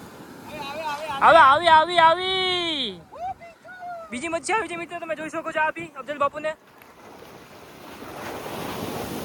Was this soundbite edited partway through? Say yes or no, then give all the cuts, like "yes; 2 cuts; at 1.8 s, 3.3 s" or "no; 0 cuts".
no; 0 cuts